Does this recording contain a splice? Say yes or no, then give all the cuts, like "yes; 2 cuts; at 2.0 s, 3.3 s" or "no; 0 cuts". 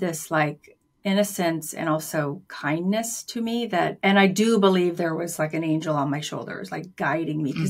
yes; 1 cut; at 4.0 s